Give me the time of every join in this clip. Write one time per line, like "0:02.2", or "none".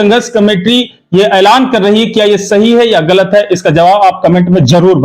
none